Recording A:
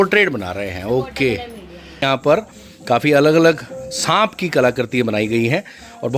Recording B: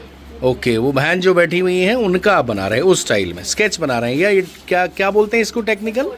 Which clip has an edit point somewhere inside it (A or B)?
A